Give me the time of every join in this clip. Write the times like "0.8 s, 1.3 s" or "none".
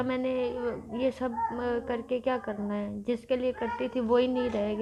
none